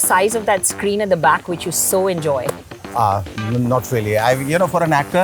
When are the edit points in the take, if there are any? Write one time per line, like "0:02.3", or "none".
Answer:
none